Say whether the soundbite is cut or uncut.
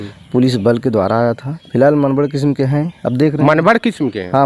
cut